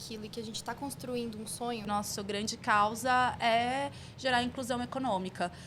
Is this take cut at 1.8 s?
yes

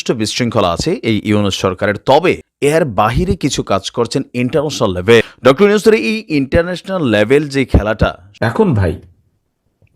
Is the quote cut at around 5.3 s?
yes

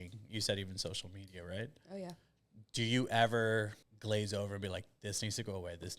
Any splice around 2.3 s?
no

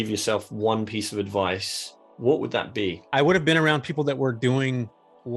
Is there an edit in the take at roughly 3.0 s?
yes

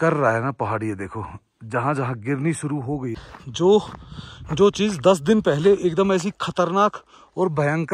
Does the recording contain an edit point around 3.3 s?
yes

